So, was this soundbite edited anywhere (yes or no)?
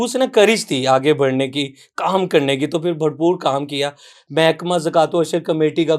no